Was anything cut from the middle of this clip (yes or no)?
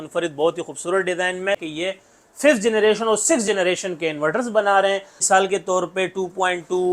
yes